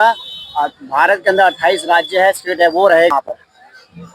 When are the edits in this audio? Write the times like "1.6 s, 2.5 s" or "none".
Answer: 3.1 s